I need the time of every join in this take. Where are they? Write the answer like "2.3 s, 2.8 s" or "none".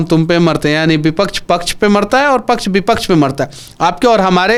none